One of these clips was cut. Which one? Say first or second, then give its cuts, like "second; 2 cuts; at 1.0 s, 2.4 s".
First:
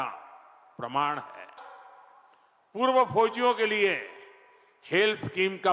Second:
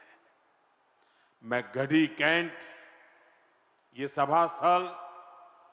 first; 1 cut; at 1.6 s